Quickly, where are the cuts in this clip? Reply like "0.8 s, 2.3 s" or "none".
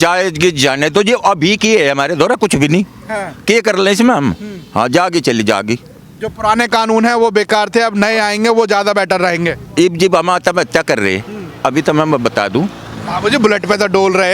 none